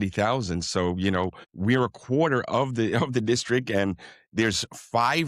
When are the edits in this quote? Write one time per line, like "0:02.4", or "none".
0:01.4